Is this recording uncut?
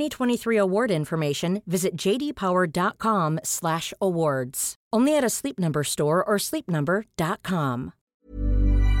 no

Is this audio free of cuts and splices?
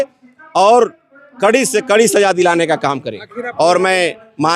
no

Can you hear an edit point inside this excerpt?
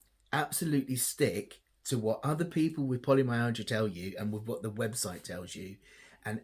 no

